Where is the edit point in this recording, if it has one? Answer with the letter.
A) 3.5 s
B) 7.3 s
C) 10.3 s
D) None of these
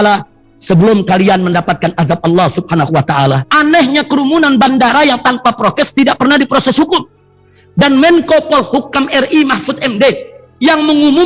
A